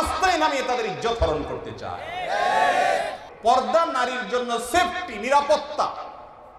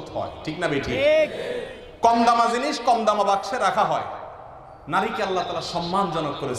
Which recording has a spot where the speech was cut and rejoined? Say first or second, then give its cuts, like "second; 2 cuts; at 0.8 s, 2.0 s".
first; 1 cut; at 3.2 s